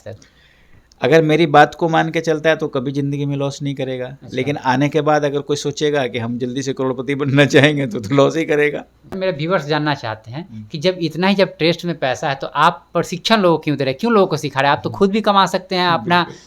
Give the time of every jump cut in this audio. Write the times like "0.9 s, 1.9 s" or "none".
9.1 s